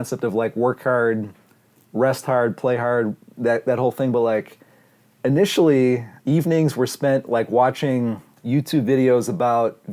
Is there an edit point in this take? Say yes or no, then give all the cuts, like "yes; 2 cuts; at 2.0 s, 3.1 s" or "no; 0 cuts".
yes; 2 cuts; at 6.1 s, 8.3 s